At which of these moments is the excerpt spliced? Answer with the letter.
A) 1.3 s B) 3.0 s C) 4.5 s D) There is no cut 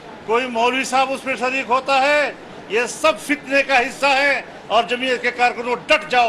D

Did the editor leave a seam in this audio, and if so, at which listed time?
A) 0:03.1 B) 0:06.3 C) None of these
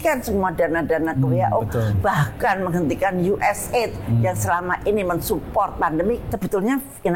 B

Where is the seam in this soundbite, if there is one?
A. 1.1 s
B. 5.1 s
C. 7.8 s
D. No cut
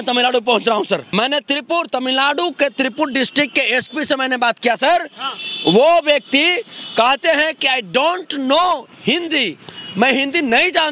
A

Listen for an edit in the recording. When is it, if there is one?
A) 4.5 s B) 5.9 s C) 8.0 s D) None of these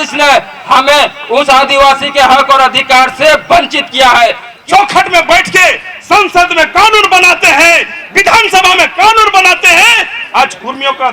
A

